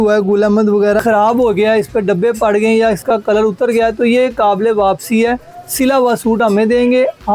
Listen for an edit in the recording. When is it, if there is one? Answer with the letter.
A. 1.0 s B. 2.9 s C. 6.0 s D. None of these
A